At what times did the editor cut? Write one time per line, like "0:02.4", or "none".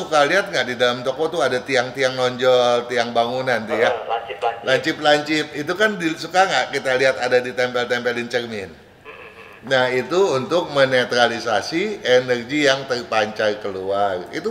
none